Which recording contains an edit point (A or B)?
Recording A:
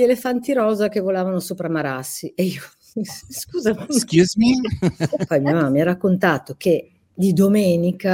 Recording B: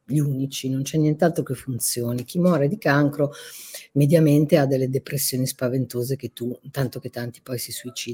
A